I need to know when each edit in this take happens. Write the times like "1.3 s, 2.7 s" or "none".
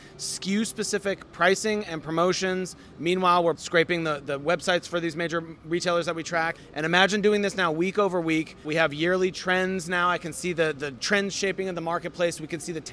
3.6 s, 6.6 s, 8.7 s, 10.9 s